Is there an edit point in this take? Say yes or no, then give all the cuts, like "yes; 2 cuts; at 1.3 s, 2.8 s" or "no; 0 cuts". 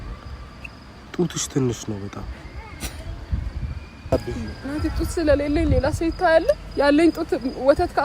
yes; 1 cut; at 4.1 s